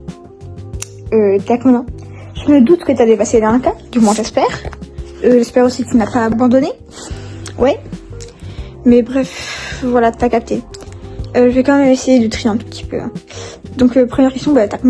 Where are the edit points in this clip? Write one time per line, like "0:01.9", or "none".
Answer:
0:06.3